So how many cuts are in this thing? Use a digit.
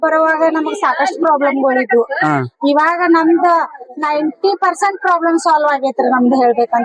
0